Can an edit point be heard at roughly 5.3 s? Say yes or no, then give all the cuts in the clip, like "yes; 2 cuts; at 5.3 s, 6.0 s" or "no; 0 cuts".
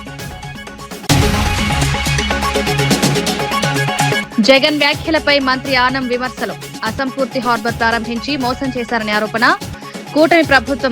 no; 3 cuts; at 1.1 s, 2.4 s, 3.8 s